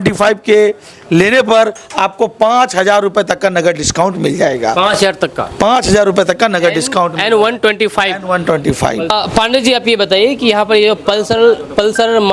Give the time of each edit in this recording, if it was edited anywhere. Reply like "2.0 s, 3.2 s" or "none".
none